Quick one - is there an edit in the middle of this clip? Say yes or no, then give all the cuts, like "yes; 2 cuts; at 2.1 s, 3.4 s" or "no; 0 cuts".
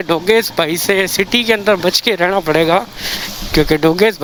no; 0 cuts